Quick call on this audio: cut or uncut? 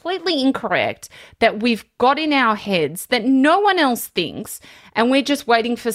uncut